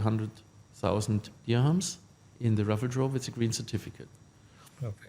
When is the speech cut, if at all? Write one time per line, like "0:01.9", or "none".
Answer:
none

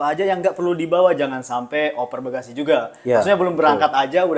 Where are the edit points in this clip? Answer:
none

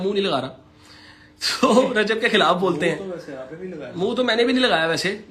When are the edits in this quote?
none

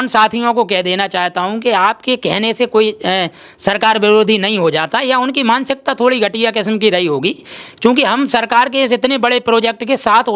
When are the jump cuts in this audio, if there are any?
none

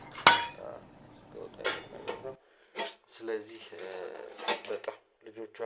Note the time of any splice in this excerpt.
none

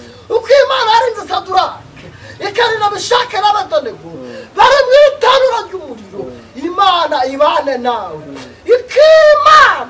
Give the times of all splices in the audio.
none

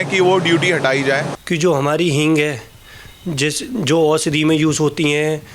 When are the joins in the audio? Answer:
0:01.3

